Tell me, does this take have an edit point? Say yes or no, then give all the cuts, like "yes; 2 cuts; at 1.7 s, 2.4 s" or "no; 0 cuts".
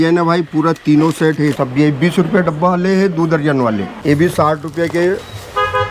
yes; 2 cuts; at 1.6 s, 4.0 s